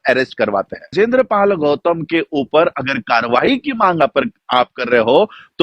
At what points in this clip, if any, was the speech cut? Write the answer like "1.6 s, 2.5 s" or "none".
0.9 s